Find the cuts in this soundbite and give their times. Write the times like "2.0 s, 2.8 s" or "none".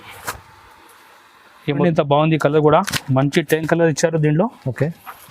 1.8 s